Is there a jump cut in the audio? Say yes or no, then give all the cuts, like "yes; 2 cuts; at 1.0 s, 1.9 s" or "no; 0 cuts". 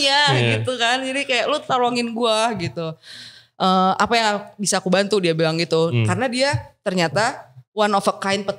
no; 0 cuts